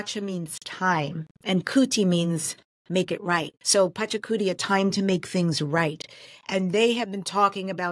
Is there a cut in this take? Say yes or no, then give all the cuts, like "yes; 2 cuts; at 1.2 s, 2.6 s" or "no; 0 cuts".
yes; 1 cut; at 3.6 s